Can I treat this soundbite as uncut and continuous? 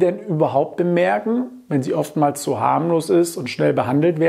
yes; 0 cuts

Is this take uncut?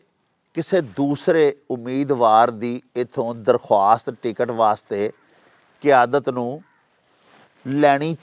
yes; 0 cuts

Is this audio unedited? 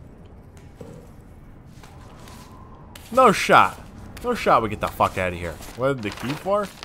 no; 1 cut; at 5.6 s

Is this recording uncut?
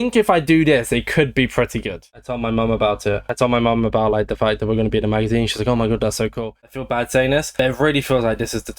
no; 2 cuts; at 2.0 s, 6.5 s

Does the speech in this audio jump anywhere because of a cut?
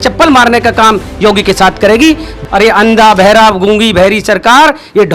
yes; 1 cut; at 2.3 s

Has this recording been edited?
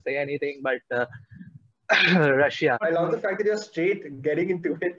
yes; 1 cut; at 2.8 s

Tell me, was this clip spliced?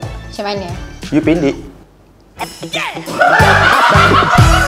no; 0 cuts

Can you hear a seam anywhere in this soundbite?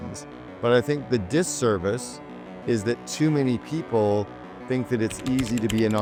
no; 0 cuts

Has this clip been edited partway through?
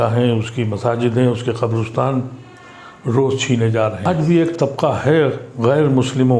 yes; 1 cut; at 4.0 s

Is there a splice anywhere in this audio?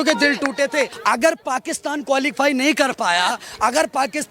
yes; 1 cut; at 0.9 s

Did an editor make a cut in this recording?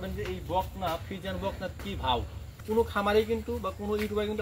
yes; 1 cut; at 2.5 s

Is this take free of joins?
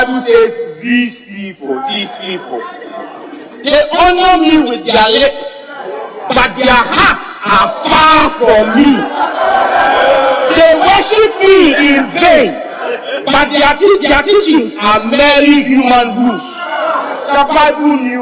yes; 0 cuts

